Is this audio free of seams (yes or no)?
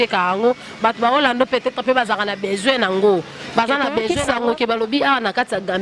no